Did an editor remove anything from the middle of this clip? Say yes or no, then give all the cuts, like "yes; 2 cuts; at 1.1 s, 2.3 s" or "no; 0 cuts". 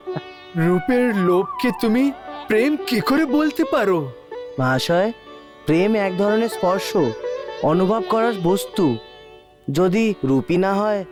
no; 0 cuts